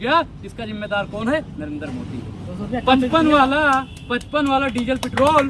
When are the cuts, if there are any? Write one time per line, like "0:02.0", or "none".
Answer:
none